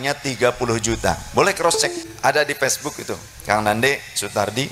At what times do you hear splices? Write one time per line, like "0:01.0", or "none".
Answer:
0:02.0